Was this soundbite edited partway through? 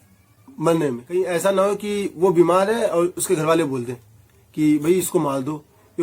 yes; 1 cut; at 1.0 s

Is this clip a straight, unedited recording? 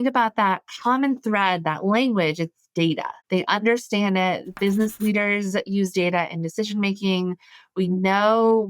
no; 1 cut; at 3.1 s

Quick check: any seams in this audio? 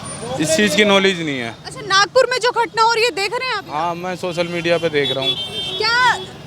no; 0 cuts

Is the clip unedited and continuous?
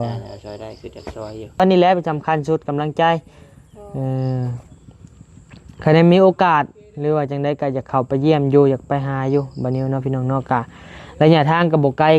no; 1 cut; at 1.6 s

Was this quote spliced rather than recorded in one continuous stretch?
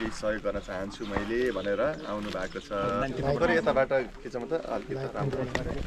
no; 0 cuts

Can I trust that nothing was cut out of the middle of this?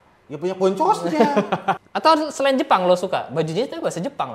no; 1 cut; at 1.8 s

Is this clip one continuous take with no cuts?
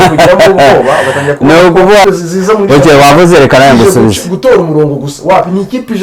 no; 1 cut; at 2.0 s

